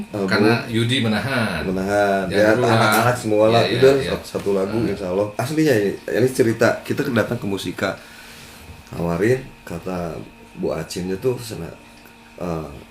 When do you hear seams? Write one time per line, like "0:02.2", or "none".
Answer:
0:05.3